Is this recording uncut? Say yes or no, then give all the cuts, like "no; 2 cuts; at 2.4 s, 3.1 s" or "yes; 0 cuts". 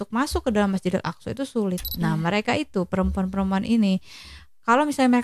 no; 1 cut; at 1.9 s